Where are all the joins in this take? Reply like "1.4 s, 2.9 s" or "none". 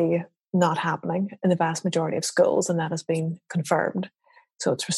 none